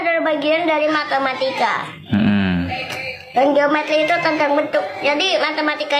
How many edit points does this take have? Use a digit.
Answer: 0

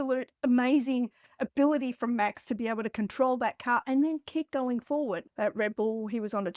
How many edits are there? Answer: 1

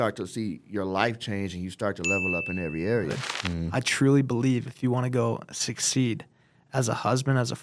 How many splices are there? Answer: 1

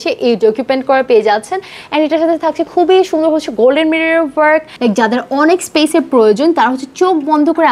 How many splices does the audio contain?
1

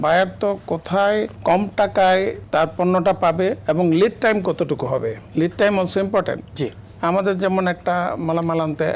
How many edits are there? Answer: 4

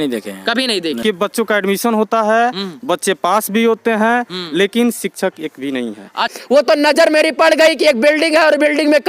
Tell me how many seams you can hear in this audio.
2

